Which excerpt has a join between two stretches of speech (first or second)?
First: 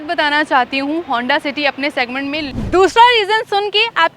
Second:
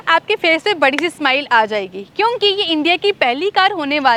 first